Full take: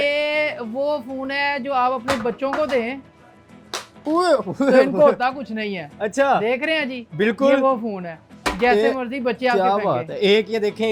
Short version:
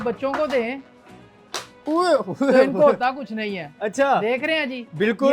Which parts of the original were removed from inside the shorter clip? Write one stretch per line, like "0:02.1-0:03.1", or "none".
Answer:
none